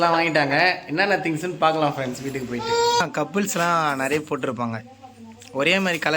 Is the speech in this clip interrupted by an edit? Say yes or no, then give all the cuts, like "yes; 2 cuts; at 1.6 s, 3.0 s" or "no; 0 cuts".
yes; 1 cut; at 3.0 s